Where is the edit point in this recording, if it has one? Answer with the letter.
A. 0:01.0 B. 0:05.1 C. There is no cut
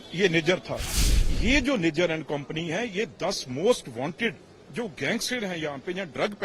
A